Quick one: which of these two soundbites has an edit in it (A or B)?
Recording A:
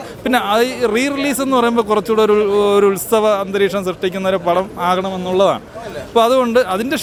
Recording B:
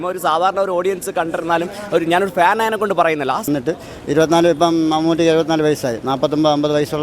B